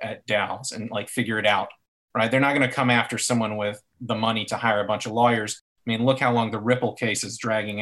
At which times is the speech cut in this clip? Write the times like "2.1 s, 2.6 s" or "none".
none